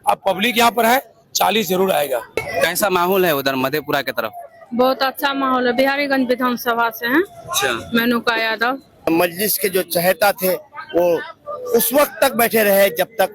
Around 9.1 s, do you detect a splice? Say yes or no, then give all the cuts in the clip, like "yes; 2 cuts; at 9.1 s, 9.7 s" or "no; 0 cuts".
yes; 2 cuts; at 2.4 s, 9.1 s